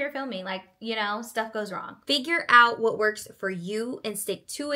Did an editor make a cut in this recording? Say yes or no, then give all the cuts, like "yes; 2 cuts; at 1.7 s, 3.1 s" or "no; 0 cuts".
yes; 1 cut; at 1.9 s